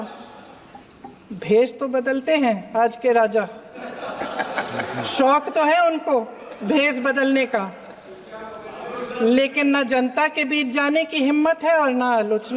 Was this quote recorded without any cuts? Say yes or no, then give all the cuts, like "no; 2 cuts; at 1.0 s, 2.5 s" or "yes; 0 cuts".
yes; 0 cuts